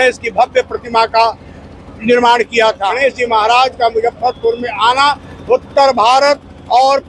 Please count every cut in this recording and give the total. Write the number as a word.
one